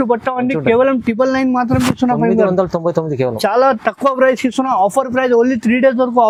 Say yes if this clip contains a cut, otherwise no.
no